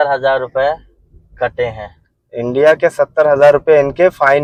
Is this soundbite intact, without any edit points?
yes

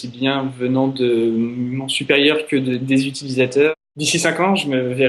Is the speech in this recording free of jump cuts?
no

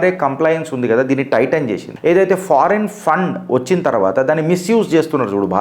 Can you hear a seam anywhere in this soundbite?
yes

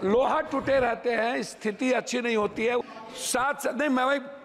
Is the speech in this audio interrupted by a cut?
yes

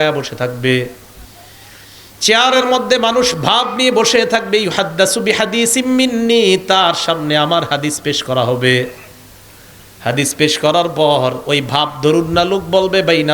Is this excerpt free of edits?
no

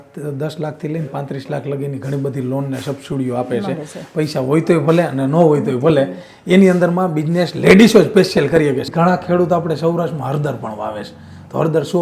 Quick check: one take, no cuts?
no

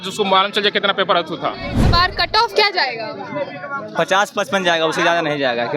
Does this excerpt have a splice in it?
yes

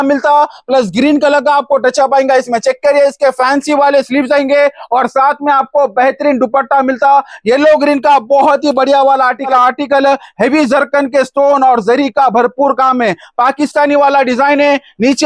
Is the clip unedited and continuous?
no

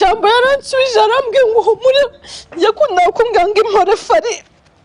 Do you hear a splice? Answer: no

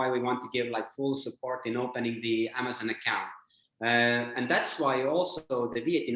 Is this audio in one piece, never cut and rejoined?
yes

